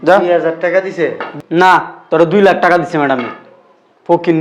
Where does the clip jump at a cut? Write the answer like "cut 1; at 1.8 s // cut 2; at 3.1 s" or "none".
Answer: none